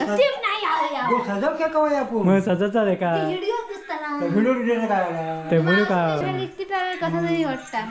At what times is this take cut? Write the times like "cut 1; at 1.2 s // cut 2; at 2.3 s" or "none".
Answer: cut 1; at 6.2 s